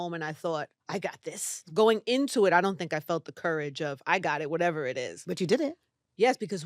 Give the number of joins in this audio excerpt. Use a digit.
1